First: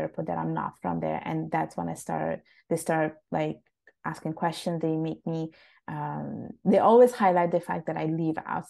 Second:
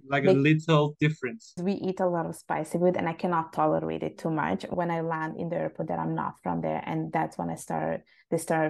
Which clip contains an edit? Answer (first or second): second